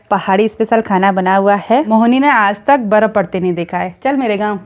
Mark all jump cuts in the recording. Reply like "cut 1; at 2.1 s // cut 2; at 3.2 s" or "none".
cut 1; at 1.9 s